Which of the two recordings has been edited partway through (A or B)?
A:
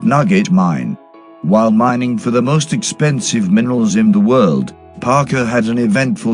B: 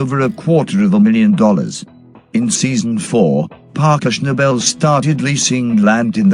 B